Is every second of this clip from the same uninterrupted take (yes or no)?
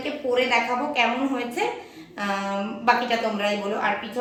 yes